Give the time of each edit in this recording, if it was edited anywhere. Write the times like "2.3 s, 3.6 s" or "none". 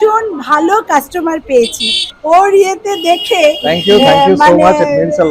2.1 s